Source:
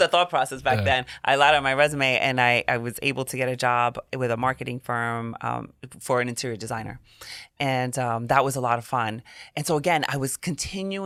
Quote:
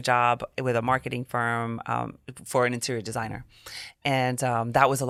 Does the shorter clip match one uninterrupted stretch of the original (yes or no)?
yes